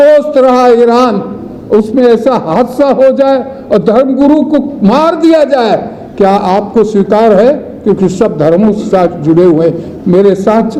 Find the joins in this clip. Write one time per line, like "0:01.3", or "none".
none